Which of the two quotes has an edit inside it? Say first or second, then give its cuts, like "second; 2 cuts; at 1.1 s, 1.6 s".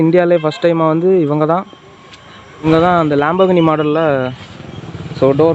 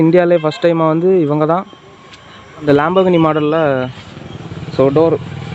second; 1 cut; at 2.6 s